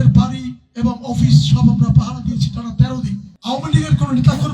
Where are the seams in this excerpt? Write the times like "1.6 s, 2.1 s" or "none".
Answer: 3.3 s